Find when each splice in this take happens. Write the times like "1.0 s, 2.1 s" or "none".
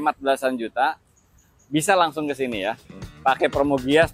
2.8 s